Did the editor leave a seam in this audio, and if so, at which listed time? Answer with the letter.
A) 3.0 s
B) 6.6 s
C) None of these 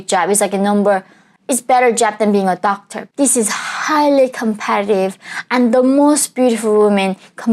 A